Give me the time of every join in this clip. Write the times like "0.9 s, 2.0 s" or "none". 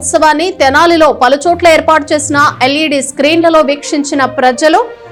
none

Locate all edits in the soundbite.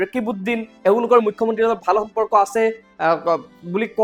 none

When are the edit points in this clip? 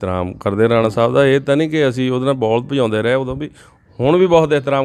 none

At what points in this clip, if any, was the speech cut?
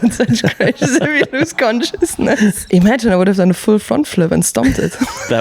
2.6 s

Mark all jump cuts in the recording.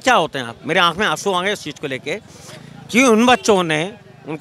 none

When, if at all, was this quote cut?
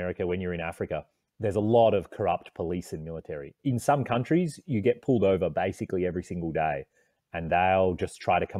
none

